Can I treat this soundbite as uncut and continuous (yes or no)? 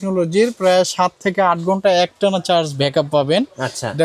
yes